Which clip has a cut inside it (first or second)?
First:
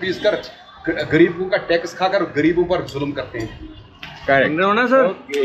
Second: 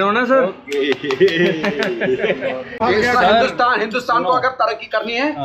second